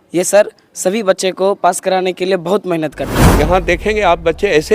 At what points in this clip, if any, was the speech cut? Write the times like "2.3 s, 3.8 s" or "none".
3.2 s